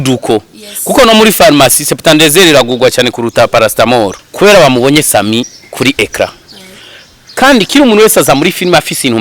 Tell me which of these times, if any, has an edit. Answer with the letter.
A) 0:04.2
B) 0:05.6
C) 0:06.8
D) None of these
A